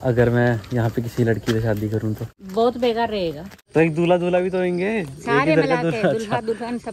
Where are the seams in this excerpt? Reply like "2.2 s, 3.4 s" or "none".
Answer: 2.3 s, 3.5 s